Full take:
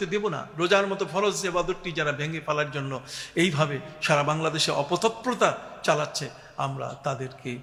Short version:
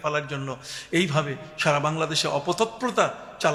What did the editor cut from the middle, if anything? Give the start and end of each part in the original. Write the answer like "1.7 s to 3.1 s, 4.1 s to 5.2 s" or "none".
none